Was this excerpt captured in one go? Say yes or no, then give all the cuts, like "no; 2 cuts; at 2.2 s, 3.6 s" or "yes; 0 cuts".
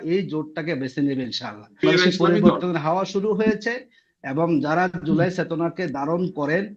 no; 1 cut; at 1.8 s